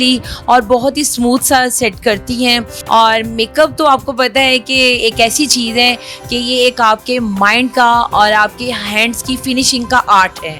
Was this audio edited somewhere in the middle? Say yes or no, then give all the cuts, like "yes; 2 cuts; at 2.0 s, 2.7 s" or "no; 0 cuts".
yes; 1 cut; at 2.7 s